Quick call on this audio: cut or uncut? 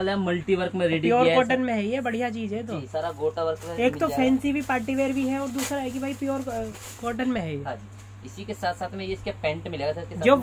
uncut